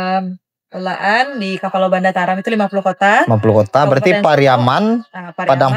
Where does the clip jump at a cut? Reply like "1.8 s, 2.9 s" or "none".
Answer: none